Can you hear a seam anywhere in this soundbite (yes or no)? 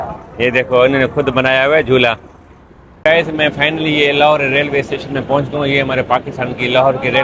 yes